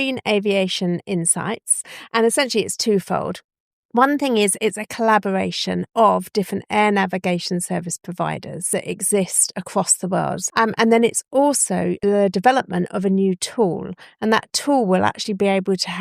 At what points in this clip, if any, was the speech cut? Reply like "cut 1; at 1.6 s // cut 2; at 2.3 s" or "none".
cut 1; at 8.6 s // cut 2; at 10.4 s // cut 3; at 12.0 s